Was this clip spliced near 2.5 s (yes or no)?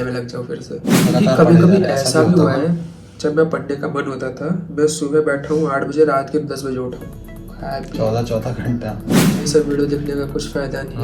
no